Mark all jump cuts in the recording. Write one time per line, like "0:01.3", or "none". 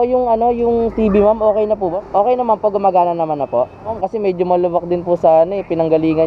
0:02.0
0:03.9

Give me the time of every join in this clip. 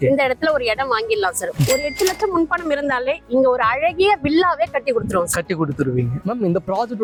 none

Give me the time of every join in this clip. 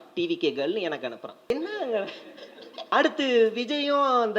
0:01.5
0:02.9

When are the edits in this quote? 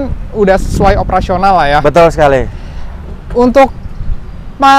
none

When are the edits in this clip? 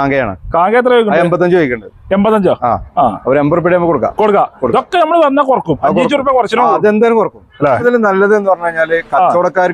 0:07.8

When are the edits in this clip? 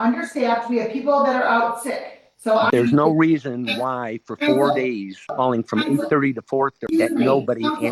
0:02.7
0:05.3
0:06.8

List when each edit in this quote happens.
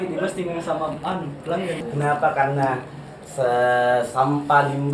0:01.8

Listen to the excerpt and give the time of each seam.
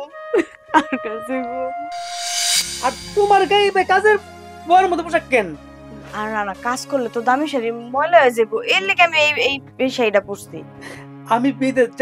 0:02.5

